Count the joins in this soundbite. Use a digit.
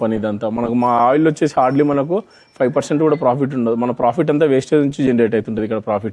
0